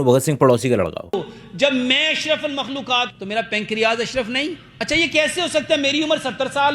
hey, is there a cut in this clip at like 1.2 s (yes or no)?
yes